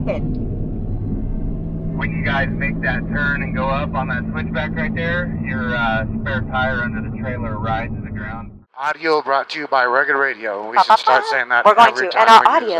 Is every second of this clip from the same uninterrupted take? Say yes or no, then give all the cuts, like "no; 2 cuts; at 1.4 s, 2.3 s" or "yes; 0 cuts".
no; 1 cut; at 8.4 s